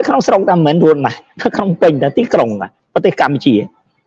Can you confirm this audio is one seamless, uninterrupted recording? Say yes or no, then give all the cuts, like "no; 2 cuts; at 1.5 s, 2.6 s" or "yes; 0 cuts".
yes; 0 cuts